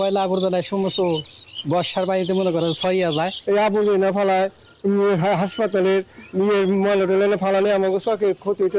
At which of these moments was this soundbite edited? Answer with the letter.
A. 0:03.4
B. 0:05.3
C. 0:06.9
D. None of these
A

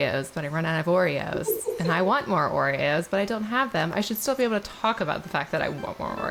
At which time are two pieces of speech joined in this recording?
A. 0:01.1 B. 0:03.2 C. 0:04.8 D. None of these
D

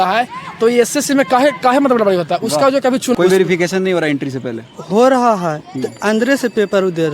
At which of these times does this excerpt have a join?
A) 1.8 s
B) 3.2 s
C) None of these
B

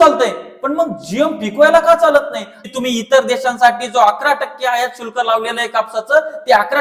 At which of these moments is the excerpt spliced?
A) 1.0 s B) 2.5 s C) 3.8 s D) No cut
B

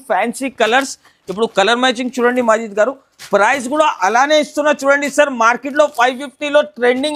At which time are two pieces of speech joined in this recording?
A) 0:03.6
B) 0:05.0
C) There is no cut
C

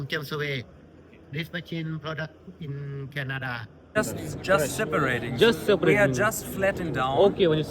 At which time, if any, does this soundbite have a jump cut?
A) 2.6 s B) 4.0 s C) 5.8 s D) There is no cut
B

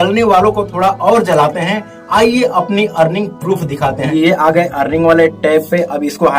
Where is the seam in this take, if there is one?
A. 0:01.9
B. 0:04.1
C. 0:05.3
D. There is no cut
B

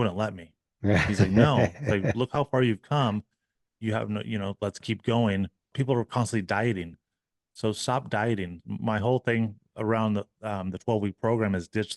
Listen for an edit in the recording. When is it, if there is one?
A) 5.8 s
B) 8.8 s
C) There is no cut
A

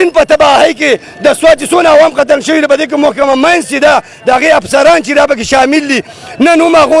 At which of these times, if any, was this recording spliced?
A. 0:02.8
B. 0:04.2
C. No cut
C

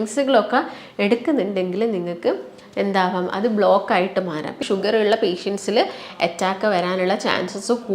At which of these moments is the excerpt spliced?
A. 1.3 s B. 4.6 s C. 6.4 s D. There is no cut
B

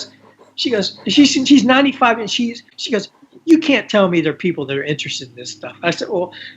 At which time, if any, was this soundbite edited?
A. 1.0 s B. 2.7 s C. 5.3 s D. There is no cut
B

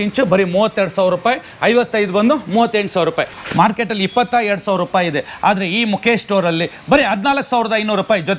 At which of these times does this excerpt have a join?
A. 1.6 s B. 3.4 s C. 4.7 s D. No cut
B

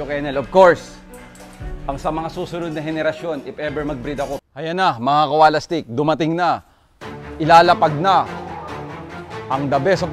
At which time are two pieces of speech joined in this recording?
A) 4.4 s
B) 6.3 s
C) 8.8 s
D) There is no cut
A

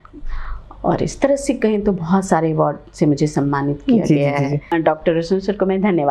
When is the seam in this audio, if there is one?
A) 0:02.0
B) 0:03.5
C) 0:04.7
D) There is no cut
C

